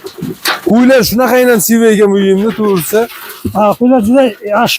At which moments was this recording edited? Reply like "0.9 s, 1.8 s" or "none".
none